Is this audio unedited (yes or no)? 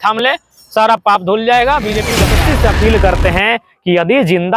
no